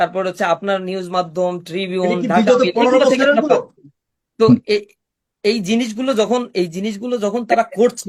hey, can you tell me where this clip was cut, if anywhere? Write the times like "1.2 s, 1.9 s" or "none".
none